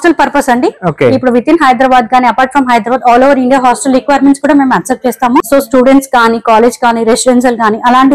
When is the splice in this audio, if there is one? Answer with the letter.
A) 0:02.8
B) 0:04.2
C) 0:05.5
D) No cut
C